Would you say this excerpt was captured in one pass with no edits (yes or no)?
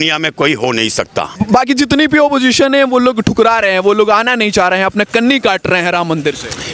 yes